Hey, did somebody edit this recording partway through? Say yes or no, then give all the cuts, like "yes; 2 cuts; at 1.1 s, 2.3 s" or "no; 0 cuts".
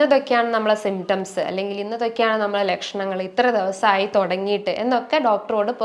no; 0 cuts